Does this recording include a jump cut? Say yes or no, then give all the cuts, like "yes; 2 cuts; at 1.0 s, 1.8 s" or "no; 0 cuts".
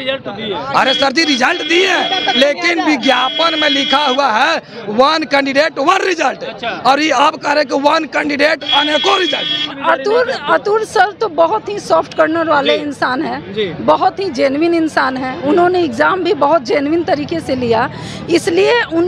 yes; 1 cut; at 9.8 s